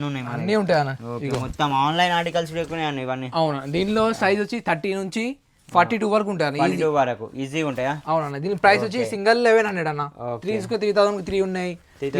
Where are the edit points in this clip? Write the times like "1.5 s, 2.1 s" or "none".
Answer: none